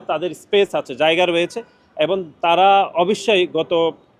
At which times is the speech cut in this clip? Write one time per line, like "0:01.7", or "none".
none